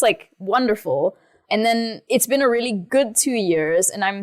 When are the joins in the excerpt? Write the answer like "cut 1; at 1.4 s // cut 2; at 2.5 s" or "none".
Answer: cut 1; at 2.0 s // cut 2; at 2.8 s